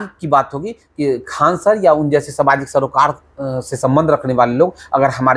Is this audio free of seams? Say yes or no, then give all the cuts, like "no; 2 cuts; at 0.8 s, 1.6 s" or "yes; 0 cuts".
yes; 0 cuts